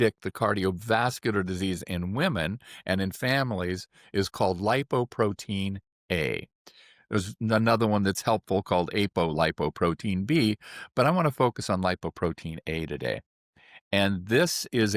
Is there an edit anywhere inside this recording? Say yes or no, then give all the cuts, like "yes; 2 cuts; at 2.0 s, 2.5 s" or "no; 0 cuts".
no; 0 cuts